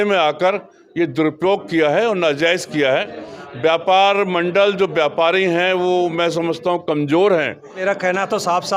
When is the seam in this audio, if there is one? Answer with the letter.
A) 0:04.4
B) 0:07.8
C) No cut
B